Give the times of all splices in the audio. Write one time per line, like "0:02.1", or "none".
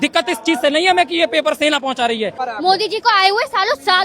0:02.4